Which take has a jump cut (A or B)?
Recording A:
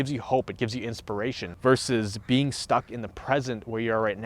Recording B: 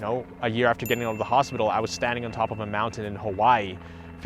A